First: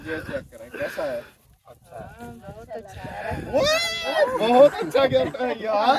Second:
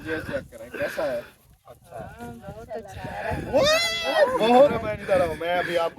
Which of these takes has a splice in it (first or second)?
second